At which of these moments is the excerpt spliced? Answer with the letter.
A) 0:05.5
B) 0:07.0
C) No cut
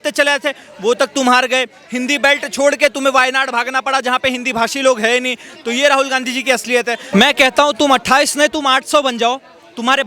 B